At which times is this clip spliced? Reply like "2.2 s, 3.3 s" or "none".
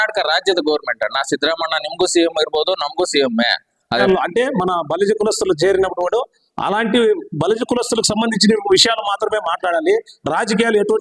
4.0 s